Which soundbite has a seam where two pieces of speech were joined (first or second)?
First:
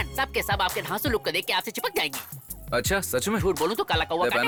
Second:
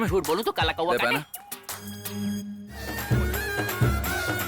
second